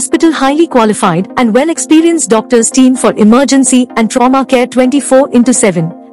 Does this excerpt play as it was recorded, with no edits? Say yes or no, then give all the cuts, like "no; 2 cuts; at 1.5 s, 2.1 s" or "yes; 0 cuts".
yes; 0 cuts